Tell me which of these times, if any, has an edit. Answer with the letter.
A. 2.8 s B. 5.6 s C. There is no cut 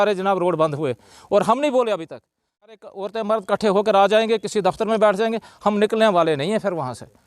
A